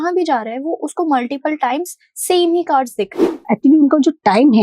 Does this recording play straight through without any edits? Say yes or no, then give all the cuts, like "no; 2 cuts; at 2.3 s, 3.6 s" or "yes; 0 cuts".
no; 1 cut; at 3.3 s